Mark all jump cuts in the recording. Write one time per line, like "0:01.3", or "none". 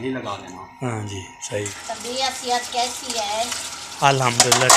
0:01.8

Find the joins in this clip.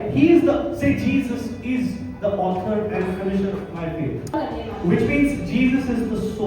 0:04.3

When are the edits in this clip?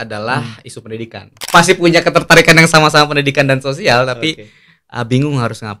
0:01.4

